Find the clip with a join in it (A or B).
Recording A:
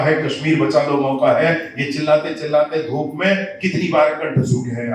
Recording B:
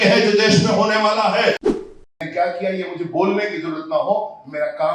B